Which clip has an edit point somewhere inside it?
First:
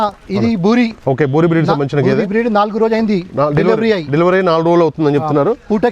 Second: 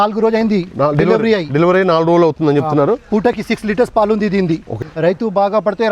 second; 1 cut; at 4.7 s

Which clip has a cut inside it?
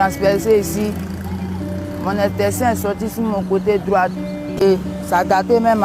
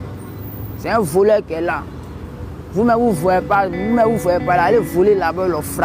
first; 1 cut; at 4.6 s

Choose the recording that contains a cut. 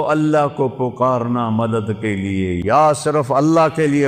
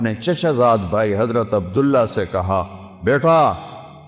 first; 1 cut; at 2.6 s

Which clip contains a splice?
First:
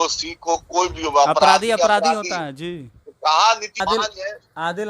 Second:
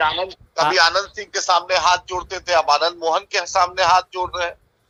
first; 1 cut; at 3.8 s

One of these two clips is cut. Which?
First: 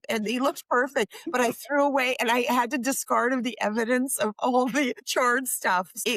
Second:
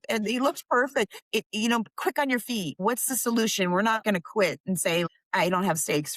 second; 4 cuts; at 1.2 s, 2.7 s, 4.0 s, 5.1 s

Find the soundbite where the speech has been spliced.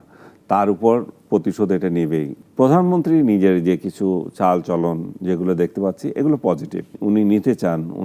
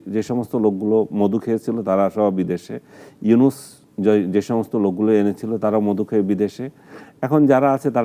first; 2 cuts; at 2.4 s, 7.0 s

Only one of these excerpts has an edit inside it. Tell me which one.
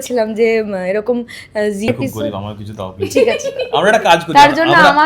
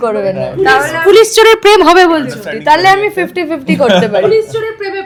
first; 1 cut; at 1.9 s

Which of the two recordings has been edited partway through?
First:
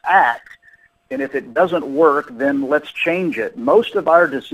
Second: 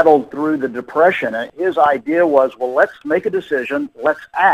second; 2 cuts; at 1.5 s, 3.0 s

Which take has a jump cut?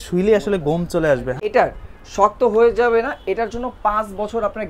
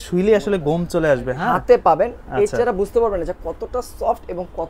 first; 1 cut; at 1.3 s

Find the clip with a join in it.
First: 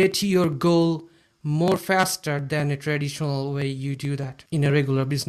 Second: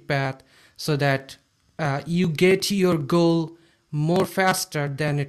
first; 1 cut; at 4.3 s

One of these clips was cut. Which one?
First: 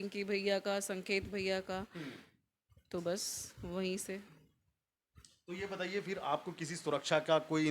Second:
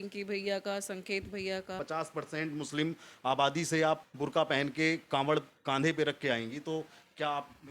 second; 2 cuts; at 1.8 s, 4.1 s

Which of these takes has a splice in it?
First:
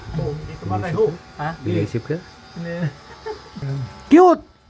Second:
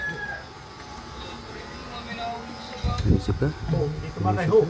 first; 1 cut; at 3.4 s

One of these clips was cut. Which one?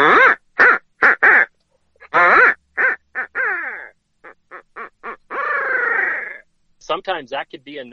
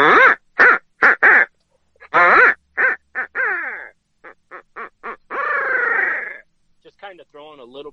first; 1 cut; at 6.8 s

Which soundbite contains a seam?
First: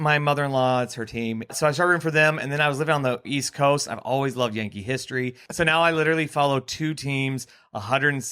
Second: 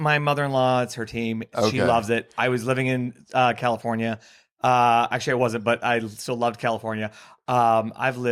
first; 3 cuts; at 1.5 s, 3.3 s, 5.4 s

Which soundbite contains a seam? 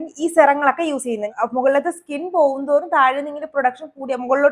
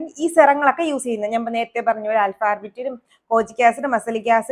first; 1 cut; at 1.3 s

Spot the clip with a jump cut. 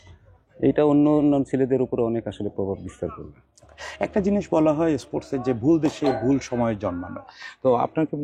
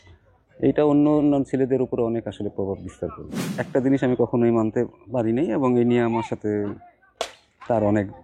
second; 1 cut; at 3.5 s

